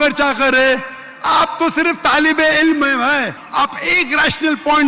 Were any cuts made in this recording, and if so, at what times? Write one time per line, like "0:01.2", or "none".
0:03.4